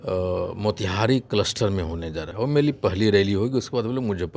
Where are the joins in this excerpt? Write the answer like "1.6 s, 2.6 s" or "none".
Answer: 2.2 s